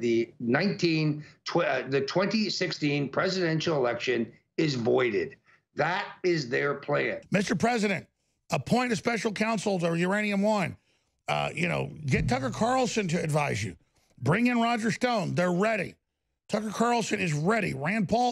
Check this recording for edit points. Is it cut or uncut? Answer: cut